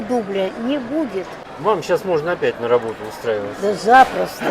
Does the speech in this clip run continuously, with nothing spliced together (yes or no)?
no